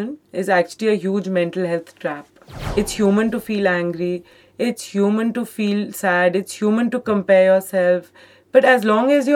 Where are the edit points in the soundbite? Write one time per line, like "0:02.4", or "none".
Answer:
0:02.6